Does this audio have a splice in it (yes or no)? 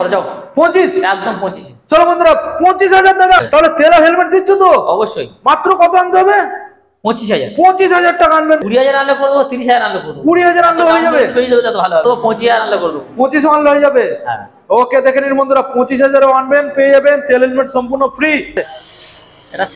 yes